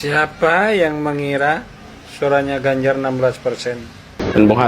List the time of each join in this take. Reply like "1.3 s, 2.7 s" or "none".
3.8 s